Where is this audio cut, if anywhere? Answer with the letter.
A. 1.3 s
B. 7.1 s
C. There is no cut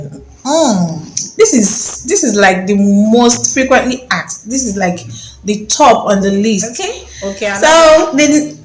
B